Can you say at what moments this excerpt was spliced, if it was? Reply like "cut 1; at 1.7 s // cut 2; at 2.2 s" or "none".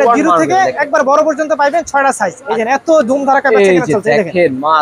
cut 1; at 2.4 s